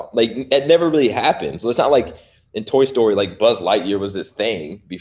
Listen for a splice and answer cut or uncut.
uncut